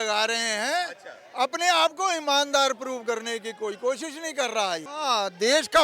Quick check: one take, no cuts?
no; 1 cut; at 4.9 s

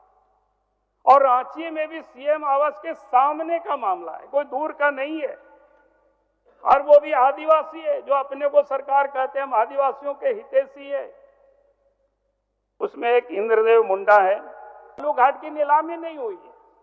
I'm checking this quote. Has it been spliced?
yes; 1 cut; at 15.0 s

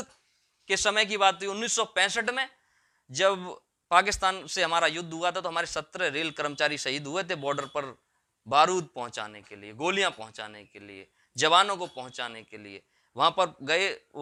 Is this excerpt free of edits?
yes; 0 cuts

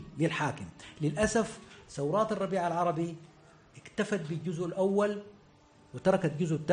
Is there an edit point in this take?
no; 0 cuts

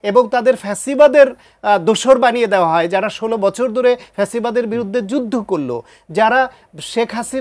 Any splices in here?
no; 0 cuts

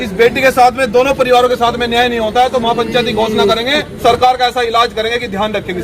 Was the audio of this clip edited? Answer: yes; 1 cut; at 4.0 s

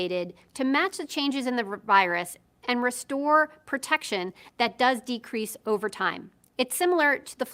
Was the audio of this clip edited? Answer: yes; 2 cuts; at 2.0 s, 6.2 s

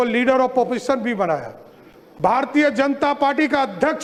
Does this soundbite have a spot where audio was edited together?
no; 0 cuts

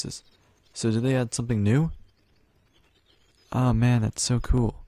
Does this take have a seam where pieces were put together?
yes; 1 cut; at 2.4 s

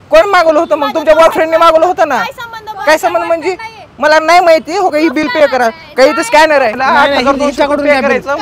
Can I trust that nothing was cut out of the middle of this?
no; 1 cut; at 6.8 s

